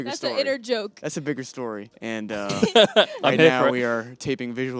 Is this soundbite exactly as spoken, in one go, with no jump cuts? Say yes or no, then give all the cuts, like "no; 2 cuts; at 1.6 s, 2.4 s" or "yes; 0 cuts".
no; 1 cut; at 1.9 s